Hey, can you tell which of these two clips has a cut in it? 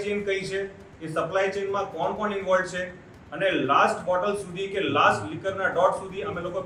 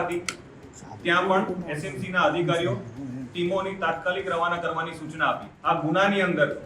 second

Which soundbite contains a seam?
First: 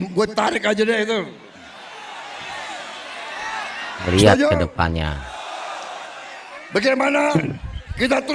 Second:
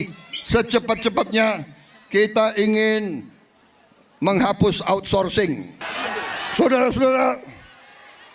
second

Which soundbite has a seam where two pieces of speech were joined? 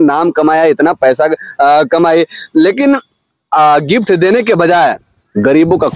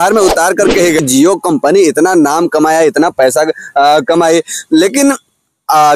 second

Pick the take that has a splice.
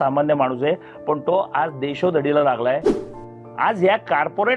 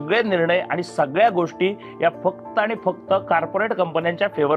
first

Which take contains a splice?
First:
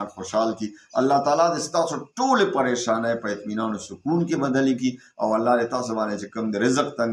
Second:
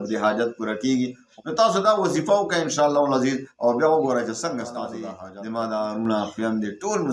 second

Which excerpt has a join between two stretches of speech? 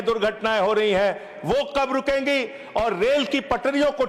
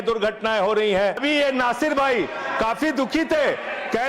second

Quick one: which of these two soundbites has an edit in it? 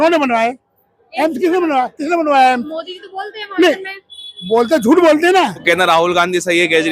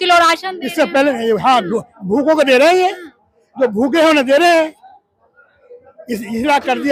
first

